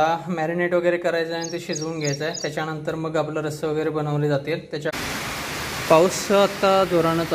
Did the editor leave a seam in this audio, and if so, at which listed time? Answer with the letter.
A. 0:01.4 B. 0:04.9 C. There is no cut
B